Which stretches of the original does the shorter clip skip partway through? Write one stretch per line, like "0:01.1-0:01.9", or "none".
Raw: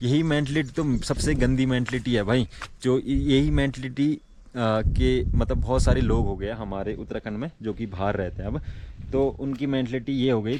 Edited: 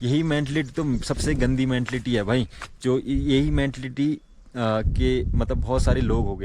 none